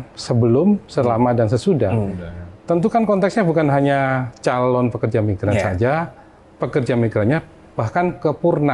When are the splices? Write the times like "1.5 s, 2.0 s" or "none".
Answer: none